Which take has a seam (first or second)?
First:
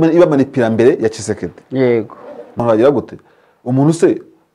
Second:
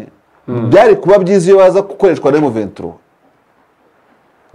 first